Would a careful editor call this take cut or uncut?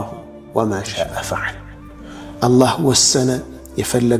uncut